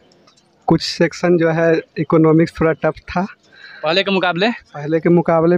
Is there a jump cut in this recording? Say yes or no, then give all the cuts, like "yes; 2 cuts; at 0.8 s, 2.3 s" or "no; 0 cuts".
no; 0 cuts